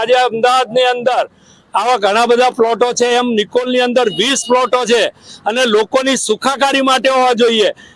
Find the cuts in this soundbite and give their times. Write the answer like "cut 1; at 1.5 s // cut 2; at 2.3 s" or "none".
none